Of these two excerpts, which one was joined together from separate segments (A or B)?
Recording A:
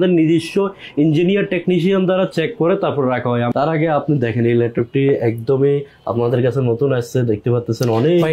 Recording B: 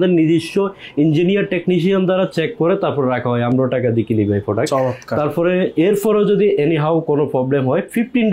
A